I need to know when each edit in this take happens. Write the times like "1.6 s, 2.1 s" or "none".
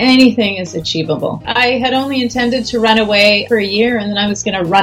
1.5 s, 3.4 s